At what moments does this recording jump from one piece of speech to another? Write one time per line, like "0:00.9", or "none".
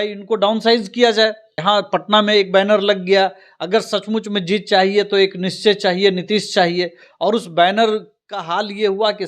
0:01.5